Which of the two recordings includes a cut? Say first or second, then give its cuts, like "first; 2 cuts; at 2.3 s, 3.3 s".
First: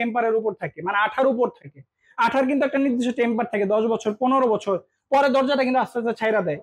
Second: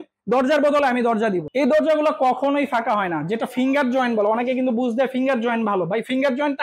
second; 1 cut; at 1.5 s